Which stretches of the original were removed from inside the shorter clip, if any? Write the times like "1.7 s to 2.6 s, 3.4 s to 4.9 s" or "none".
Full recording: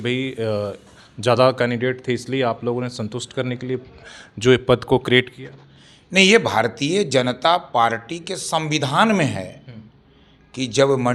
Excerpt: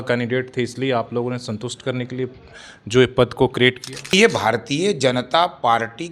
5.6 s to 6.2 s